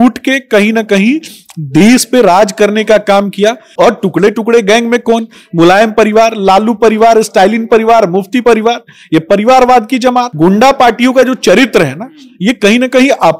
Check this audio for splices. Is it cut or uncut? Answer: cut